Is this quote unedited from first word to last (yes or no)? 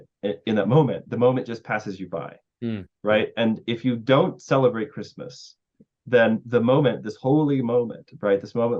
yes